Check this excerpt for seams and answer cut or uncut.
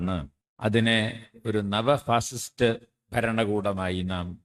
uncut